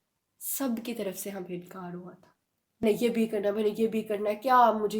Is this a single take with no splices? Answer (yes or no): no